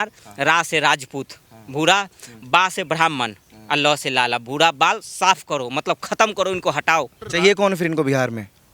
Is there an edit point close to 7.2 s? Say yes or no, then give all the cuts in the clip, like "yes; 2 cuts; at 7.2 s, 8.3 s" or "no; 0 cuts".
yes; 1 cut; at 7.2 s